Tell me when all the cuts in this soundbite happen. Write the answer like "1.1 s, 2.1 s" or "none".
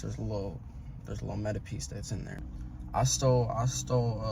2.5 s